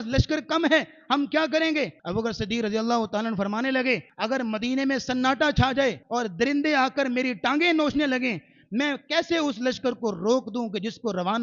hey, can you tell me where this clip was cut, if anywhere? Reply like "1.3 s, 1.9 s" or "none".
2.0 s, 4.1 s, 6.0 s